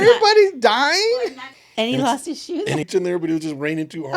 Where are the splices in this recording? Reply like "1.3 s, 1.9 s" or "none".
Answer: 1.3 s, 2.9 s